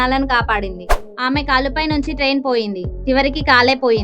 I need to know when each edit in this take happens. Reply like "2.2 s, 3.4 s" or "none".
1.1 s